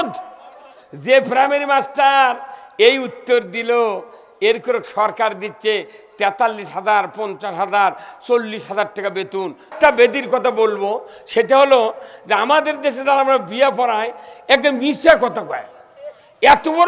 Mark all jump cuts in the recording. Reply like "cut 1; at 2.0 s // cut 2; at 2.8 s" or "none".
cut 1; at 9.7 s